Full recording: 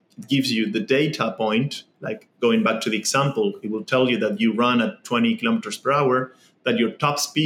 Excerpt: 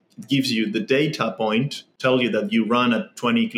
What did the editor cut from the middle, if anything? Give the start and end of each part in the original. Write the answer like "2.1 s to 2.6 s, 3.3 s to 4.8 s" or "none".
1.9 s to 3.8 s